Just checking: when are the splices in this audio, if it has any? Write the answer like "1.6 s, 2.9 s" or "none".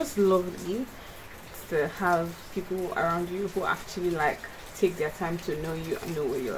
none

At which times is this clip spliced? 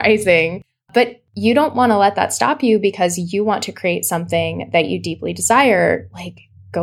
1.0 s

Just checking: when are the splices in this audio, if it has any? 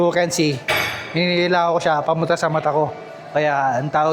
none

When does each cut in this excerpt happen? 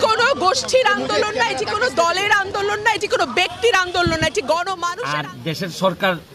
4.9 s

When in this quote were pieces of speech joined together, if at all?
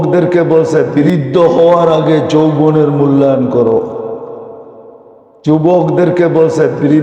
1.0 s

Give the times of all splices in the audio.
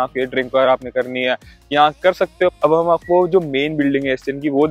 2.5 s

